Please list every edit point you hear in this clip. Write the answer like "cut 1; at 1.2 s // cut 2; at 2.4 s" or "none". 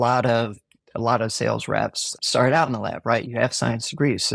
cut 1; at 2.1 s // cut 2; at 3.2 s

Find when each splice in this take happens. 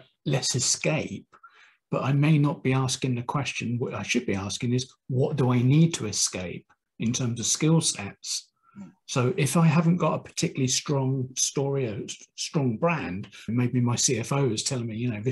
cut 1; at 13.3 s

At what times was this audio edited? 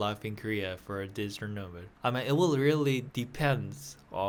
none

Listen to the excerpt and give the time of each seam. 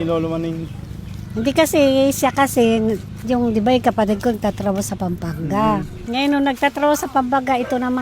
cut 1; at 6.0 s

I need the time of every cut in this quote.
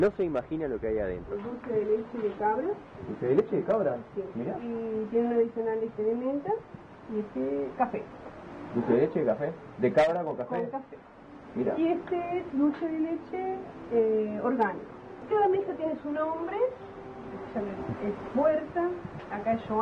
cut 1; at 1.2 s

